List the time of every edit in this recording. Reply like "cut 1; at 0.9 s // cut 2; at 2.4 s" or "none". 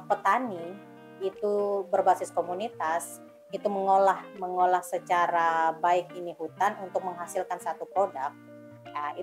none